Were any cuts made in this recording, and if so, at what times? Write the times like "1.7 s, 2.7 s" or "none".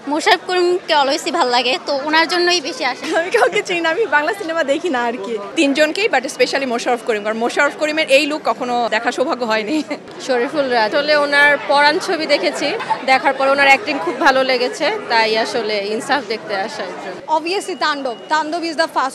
3.0 s, 5.5 s, 8.9 s, 10.1 s, 10.9 s, 12.8 s, 17.2 s